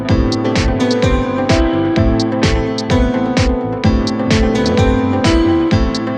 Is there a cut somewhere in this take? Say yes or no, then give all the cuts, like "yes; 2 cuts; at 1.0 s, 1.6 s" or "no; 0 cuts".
no; 0 cuts